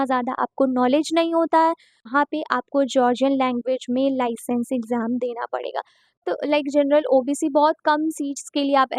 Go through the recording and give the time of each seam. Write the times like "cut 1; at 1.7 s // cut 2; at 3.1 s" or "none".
cut 1; at 2.1 s // cut 2; at 6.2 s